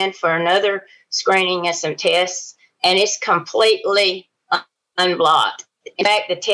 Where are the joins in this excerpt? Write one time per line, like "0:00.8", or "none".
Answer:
none